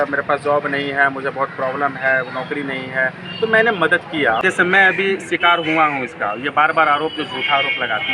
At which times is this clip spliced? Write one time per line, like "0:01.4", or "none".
0:04.4